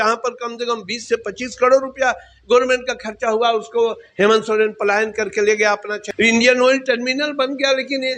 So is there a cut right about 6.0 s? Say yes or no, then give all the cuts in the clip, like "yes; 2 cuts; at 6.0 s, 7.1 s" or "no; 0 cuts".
yes; 1 cut; at 6.0 s